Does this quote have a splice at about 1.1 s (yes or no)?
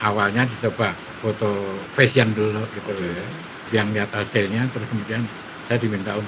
yes